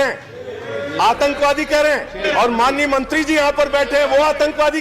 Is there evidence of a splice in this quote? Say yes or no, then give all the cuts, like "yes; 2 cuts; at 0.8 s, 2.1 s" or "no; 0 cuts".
yes; 1 cut; at 2.3 s